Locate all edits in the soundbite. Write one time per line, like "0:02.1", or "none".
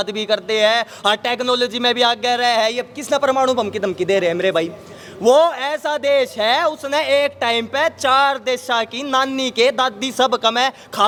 none